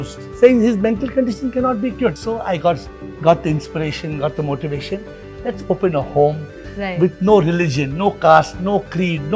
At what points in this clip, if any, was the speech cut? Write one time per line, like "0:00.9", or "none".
0:02.2